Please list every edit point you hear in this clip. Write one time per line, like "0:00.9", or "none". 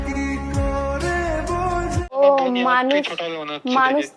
0:02.2